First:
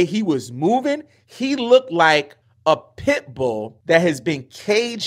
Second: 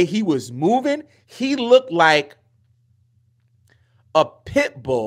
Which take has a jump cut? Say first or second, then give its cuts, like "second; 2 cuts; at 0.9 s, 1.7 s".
first; 2 cuts; at 2.4 s, 3.7 s